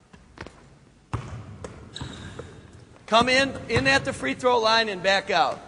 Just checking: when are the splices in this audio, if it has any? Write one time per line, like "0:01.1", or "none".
0:01.7